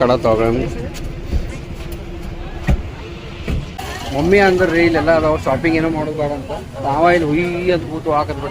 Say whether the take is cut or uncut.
cut